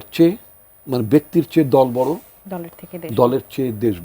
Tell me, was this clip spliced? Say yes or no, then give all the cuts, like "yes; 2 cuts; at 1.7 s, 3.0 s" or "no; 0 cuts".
no; 0 cuts